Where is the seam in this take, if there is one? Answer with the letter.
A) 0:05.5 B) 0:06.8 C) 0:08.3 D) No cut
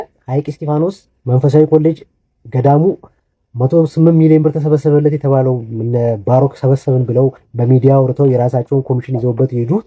D